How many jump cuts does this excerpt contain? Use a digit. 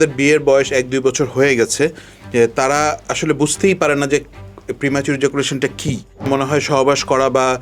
1